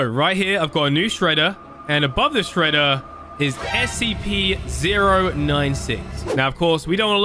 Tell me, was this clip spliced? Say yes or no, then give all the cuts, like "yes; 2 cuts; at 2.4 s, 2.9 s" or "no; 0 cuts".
yes; 1 cut; at 6.3 s